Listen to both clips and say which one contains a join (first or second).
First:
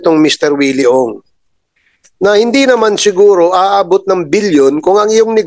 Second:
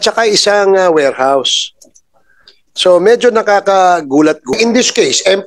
second